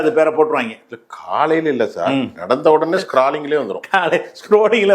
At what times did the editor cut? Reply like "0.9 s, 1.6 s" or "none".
none